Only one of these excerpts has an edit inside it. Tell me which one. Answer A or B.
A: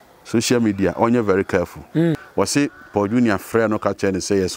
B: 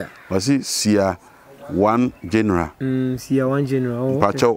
A